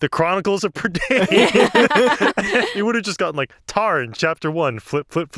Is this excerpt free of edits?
no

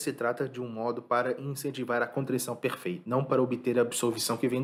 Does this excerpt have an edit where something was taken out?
no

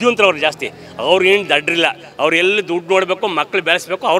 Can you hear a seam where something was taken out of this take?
no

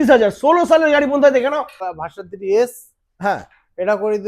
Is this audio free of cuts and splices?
no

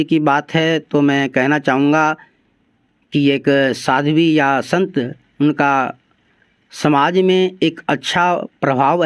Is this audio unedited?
yes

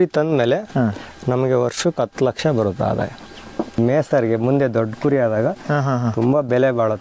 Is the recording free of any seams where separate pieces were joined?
no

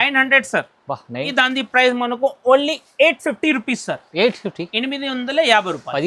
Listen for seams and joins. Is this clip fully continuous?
no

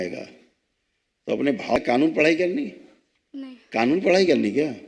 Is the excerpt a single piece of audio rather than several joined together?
no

